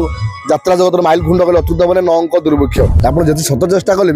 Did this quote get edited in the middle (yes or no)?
yes